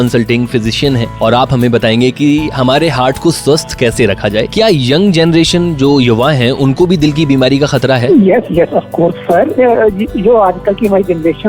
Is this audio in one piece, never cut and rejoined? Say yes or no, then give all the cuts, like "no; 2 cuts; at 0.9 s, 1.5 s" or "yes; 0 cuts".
no; 2 cuts; at 1.1 s, 4.5 s